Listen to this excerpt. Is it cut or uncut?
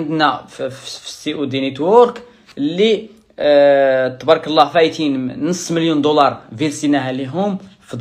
uncut